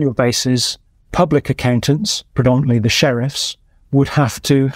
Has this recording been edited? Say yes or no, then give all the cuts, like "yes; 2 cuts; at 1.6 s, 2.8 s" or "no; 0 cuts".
no; 0 cuts